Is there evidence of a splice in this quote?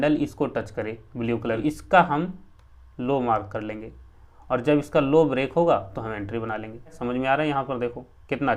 yes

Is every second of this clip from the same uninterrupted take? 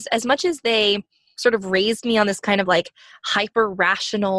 yes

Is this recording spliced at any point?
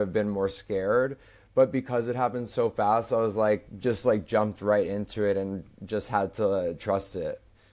no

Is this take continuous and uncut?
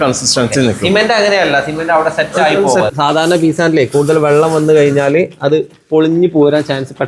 no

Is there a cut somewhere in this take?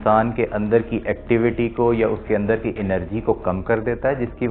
no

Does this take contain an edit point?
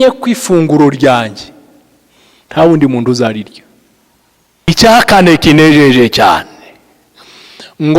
yes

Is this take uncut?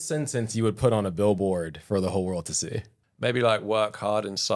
yes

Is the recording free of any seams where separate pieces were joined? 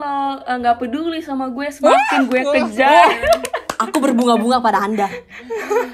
yes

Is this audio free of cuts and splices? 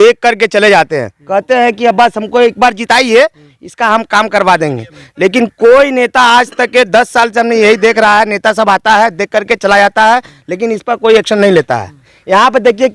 yes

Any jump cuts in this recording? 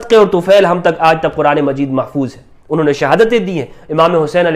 no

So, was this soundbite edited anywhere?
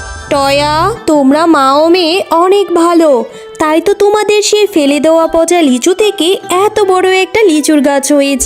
no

